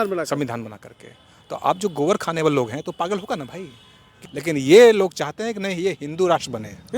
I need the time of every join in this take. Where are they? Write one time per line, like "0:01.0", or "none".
0:04.3